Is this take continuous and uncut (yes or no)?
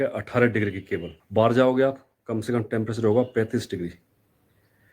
no